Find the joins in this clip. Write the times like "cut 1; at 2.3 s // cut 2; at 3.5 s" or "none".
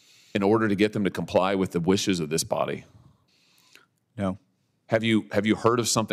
none